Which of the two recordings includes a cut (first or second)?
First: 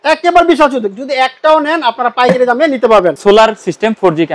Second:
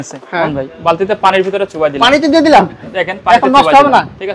first